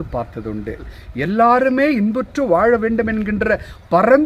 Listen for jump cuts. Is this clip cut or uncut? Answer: cut